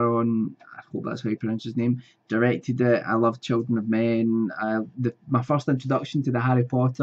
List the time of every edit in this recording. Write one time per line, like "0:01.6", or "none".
none